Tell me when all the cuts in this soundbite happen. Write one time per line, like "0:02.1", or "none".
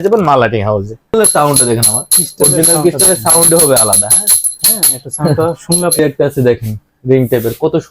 0:01.1
0:06.0